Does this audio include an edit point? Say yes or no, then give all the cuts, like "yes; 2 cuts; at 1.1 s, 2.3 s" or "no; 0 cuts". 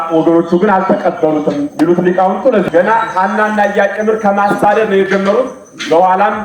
yes; 1 cut; at 2.6 s